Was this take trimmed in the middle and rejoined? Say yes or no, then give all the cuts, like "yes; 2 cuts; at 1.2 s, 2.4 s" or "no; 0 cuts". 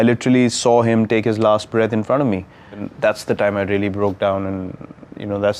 yes; 1 cut; at 2.9 s